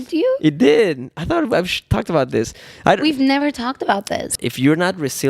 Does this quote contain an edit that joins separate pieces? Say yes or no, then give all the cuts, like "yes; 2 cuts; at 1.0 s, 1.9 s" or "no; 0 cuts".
yes; 1 cut; at 4.3 s